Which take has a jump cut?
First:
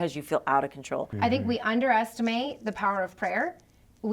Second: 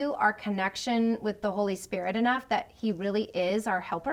first; 1 cut; at 1.1 s

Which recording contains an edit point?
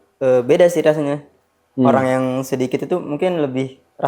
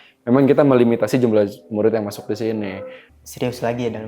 second; 1 cut; at 3.0 s

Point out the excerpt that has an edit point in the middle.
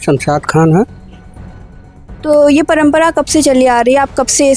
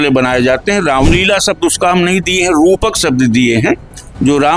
second; 1 cut; at 1.1 s

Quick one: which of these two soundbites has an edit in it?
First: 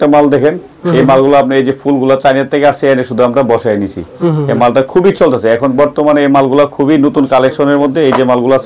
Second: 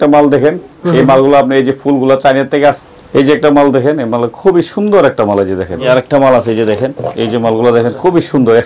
second; 2 cuts; at 2.8 s, 5.8 s

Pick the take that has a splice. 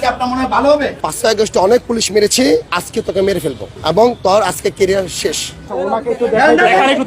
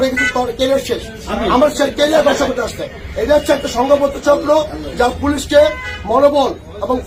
first; 4 cuts; at 1.0 s, 2.8 s, 3.7 s, 5.7 s

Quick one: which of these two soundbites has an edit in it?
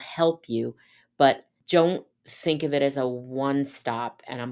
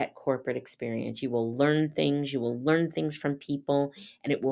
first; 1 cut; at 1.5 s

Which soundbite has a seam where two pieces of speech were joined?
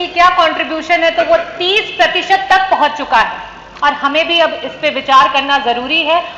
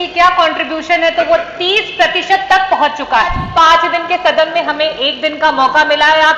second; 1 cut; at 3.4 s

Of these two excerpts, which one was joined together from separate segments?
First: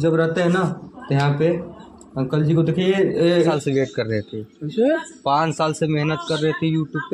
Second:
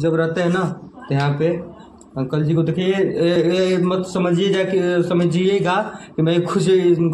first; 1 cut; at 3.4 s

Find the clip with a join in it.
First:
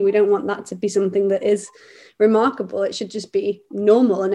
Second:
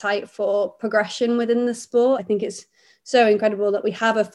second; 1 cut; at 2.2 s

